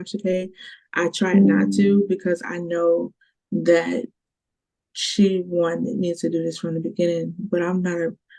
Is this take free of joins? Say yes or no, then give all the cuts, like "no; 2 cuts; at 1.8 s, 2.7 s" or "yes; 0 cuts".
yes; 0 cuts